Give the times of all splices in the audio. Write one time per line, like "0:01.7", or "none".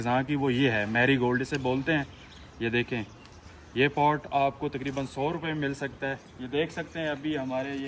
0:06.3